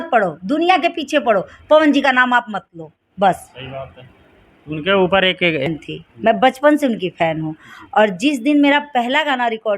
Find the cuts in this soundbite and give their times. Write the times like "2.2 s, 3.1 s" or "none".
5.7 s

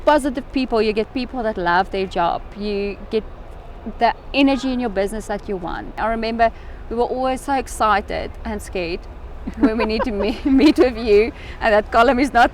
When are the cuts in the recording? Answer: 5.9 s

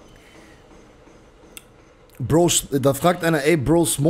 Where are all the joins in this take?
none

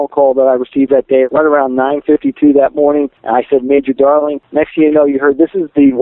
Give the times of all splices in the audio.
1.3 s, 3.2 s, 4.4 s

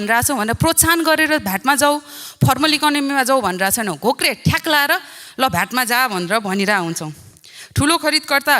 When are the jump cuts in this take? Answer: none

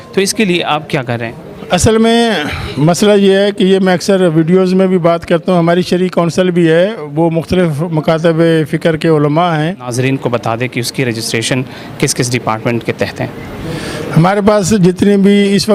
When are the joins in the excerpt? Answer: 9.9 s

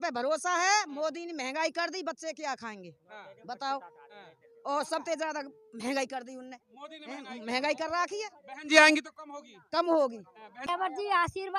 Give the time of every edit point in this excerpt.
10.6 s

